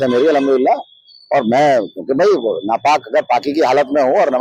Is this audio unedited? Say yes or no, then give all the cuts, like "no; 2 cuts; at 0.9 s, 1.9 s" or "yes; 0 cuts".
yes; 0 cuts